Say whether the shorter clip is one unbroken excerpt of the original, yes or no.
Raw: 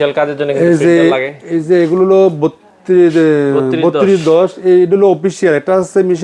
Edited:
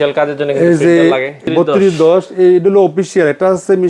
no